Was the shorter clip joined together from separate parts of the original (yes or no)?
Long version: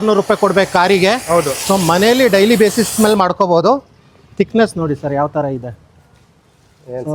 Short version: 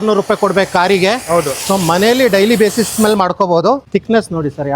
yes